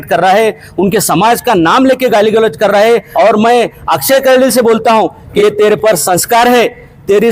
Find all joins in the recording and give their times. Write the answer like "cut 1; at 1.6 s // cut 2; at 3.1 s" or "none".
cut 1; at 3.1 s // cut 2; at 5.2 s